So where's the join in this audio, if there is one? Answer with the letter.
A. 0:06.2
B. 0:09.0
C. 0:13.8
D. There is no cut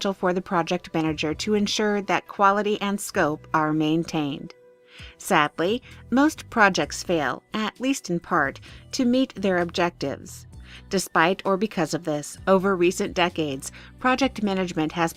D